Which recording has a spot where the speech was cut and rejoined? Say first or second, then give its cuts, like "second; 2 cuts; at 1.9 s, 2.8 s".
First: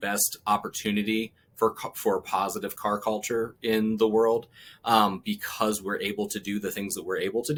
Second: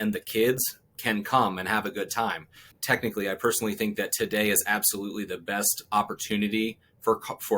second; 1 cut; at 2.8 s